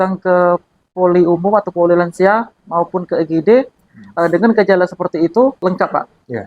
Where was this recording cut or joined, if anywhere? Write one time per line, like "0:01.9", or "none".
0:05.6